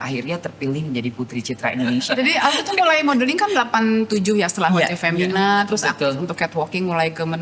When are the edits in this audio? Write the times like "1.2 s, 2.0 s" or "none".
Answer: 2.1 s